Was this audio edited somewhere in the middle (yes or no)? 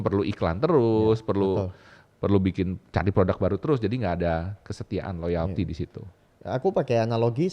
no